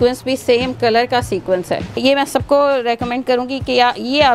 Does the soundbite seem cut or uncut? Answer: cut